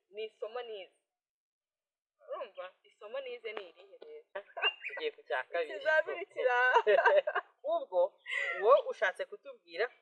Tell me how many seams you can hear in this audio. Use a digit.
1